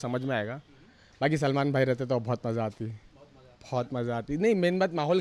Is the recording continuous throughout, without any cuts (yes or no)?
yes